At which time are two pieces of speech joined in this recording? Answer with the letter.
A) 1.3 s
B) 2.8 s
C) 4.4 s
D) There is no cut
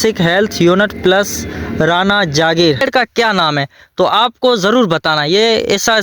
B